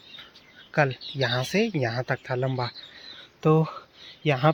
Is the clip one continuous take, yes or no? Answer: yes